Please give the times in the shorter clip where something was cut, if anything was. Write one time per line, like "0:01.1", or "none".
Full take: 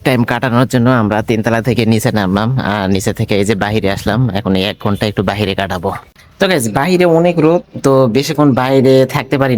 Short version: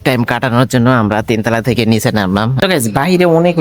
0:02.5